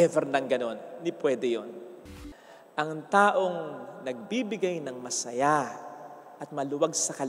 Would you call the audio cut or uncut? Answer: cut